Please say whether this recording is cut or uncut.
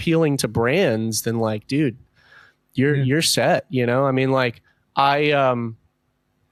uncut